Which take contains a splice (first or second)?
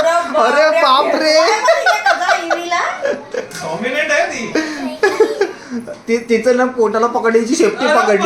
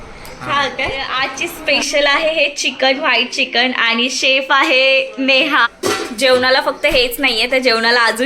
second